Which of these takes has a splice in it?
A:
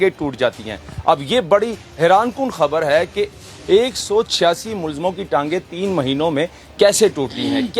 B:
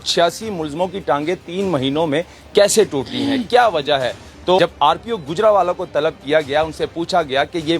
B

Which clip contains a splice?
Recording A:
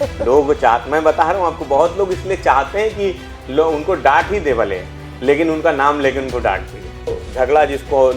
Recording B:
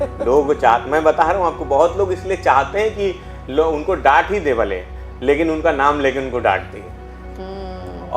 A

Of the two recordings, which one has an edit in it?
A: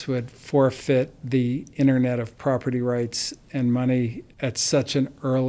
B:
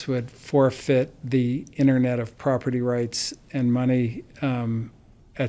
A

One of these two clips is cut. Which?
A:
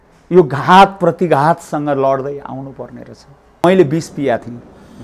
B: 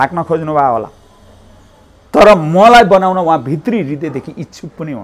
A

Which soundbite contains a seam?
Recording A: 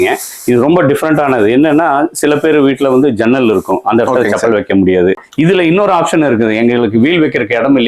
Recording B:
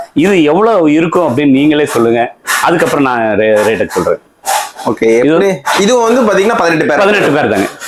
A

